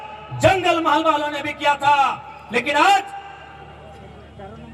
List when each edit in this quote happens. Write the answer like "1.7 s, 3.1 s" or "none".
none